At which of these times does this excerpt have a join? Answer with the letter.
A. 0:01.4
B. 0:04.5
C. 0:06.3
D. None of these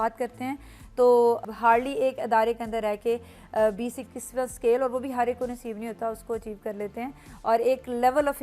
A